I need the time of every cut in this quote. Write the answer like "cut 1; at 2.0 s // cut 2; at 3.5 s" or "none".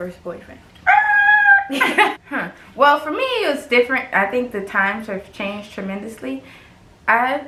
none